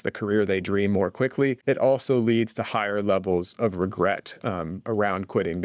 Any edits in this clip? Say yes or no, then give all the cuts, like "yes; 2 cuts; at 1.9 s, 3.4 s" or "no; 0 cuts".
yes; 1 cut; at 1.6 s